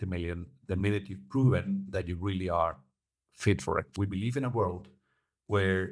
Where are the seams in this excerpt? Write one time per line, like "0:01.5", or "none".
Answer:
0:03.9